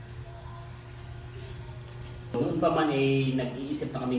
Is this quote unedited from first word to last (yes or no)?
no